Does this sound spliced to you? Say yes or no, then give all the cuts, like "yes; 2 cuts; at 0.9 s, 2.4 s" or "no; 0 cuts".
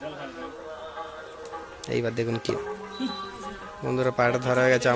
yes; 1 cut; at 4.1 s